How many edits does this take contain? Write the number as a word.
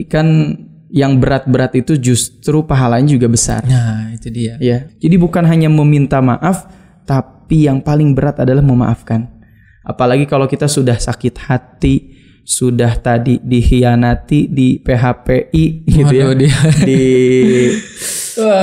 one